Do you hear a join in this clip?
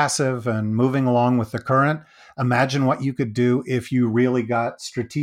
no; 0 cuts

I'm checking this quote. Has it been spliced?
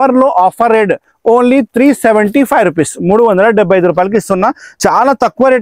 yes; 1 cut; at 4.7 s

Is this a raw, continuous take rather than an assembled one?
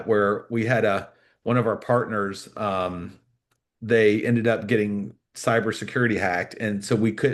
yes; 0 cuts

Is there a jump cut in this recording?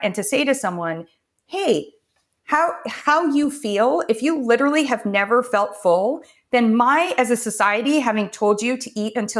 no; 0 cuts

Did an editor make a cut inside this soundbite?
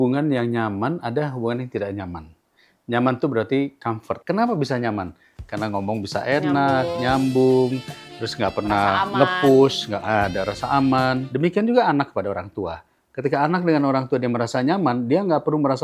no; 0 cuts

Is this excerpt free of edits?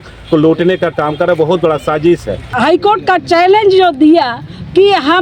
no; 1 cut; at 2.6 s

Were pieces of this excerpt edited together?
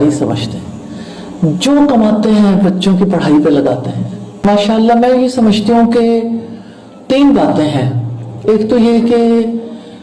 yes; 1 cut; at 4.5 s

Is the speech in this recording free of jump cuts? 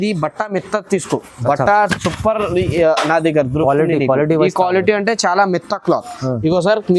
yes; 0 cuts

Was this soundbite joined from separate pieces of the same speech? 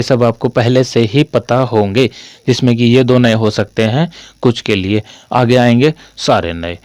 no; 0 cuts

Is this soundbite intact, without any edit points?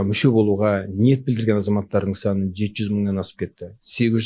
yes; 0 cuts

